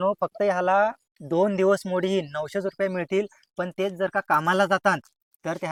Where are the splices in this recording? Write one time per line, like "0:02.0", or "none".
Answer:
none